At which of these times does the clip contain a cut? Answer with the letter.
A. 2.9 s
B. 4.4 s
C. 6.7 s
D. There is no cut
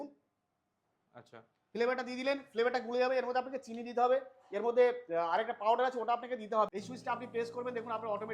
C